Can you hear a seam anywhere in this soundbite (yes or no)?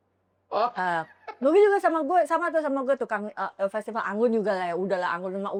no